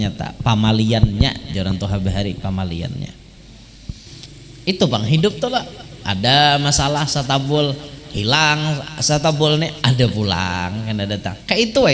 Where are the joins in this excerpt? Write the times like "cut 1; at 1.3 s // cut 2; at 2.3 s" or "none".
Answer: cut 1; at 4.2 s